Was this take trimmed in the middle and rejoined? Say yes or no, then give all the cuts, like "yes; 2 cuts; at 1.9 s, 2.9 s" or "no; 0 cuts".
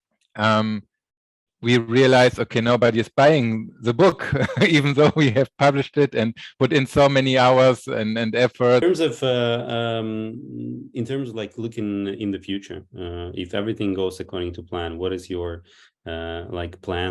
yes; 1 cut; at 8.8 s